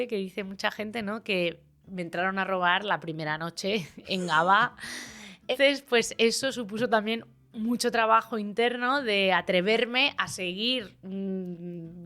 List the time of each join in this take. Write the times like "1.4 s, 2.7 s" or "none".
5.5 s